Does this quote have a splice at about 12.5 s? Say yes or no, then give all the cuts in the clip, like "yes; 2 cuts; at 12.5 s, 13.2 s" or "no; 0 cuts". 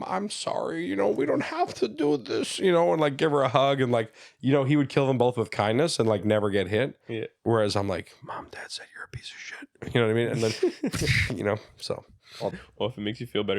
yes; 1 cut; at 12.5 s